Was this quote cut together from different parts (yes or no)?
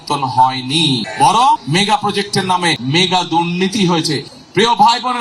yes